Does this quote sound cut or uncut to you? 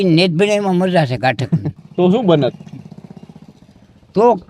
cut